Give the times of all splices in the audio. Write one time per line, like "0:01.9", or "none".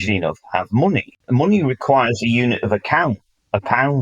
0:01.1